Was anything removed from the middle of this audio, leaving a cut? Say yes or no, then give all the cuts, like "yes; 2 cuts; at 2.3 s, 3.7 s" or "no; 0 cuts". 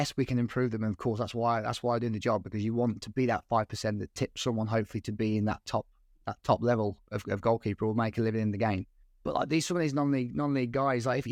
no; 0 cuts